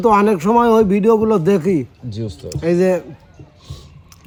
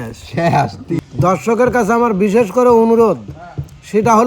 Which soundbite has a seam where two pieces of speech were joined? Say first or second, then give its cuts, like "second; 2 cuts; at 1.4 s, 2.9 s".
second; 1 cut; at 1.0 s